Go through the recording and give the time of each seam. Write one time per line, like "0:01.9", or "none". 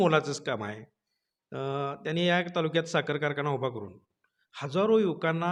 none